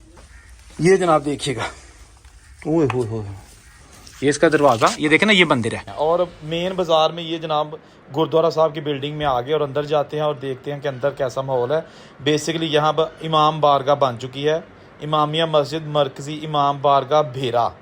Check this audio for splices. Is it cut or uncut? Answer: cut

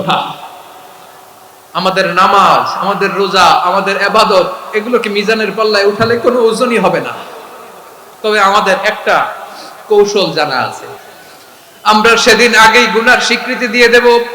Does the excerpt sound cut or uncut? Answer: cut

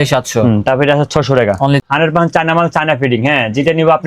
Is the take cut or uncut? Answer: cut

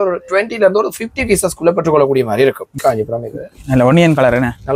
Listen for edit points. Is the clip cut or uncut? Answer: cut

